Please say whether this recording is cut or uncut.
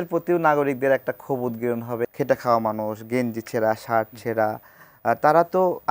cut